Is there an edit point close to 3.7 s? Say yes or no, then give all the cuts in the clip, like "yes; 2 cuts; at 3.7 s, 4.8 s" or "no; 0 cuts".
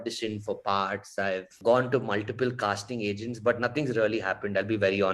no; 1 cut; at 1.5 s